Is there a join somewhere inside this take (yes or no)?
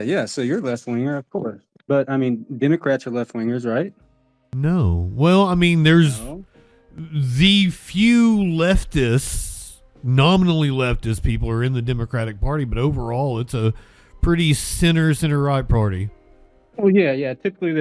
no